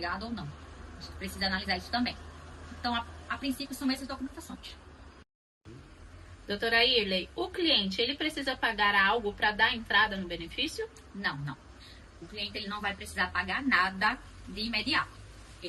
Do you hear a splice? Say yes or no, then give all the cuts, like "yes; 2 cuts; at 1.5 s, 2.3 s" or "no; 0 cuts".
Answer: yes; 1 cut; at 5.5 s